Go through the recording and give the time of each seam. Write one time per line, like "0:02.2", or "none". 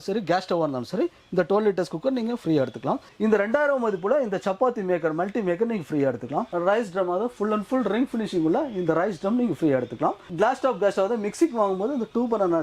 0:03.0
0:06.5
0:10.3